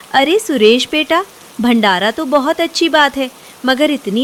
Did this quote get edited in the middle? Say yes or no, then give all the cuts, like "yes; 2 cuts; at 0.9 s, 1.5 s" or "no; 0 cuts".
no; 0 cuts